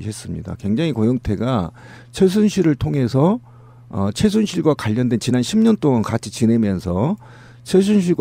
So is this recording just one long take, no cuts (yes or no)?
no